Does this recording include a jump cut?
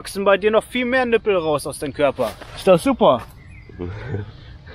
no; 0 cuts

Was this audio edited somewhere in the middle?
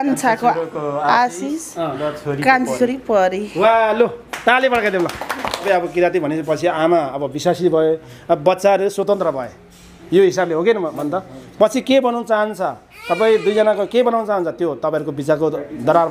yes; 1 cut; at 5.6 s

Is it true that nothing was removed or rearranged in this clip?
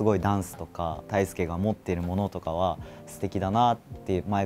no; 1 cut; at 1.0 s

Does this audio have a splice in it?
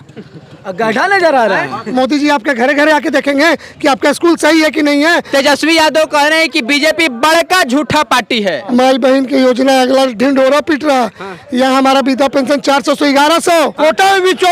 yes; 4 cuts; at 1.8 s, 5.2 s, 8.6 s, 13.7 s

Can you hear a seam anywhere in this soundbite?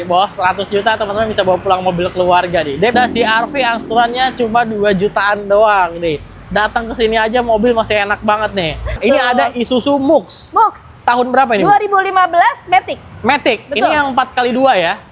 yes; 2 cuts; at 2.9 s, 9.0 s

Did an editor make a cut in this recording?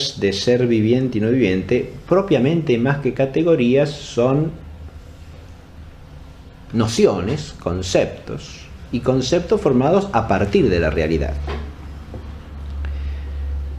yes; 1 cut; at 5.3 s

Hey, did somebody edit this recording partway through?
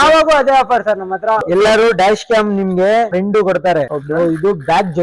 yes; 3 cuts; at 1.4 s, 3.1 s, 4.0 s

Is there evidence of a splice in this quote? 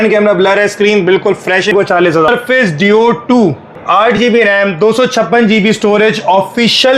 yes; 2 cuts; at 2.1 s, 3.7 s

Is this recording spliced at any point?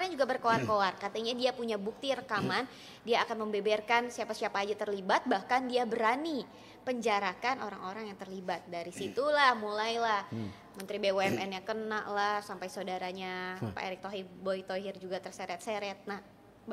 no; 0 cuts

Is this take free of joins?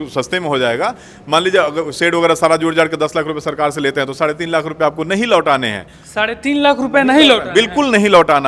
yes; 0 cuts

